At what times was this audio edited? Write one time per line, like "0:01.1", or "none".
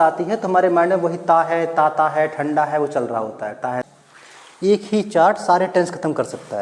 0:03.9

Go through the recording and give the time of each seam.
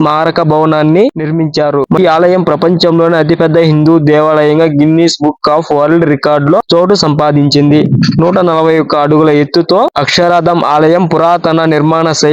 0:02.0

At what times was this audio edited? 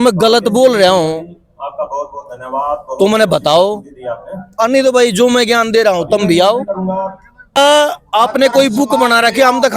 0:07.6

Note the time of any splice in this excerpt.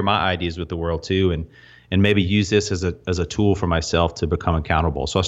none

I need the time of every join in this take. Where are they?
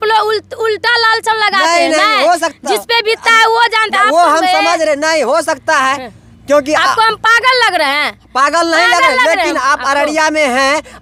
none

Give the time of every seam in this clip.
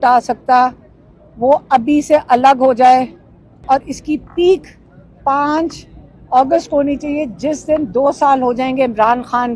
0:03.6

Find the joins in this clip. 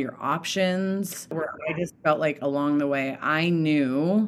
0:01.5

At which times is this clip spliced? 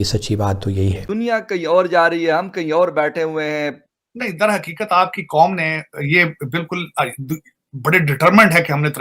0:01.1
0:03.8

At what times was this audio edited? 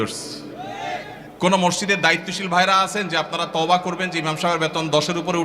0:01.2

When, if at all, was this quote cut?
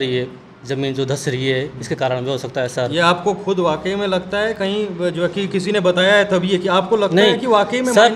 none

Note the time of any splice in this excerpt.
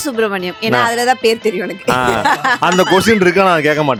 none

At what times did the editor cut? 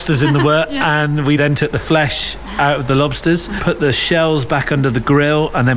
0:01.2
0:03.5

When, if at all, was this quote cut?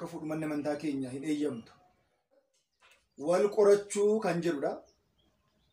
0:02.5

